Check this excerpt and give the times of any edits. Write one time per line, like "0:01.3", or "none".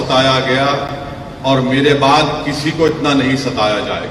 none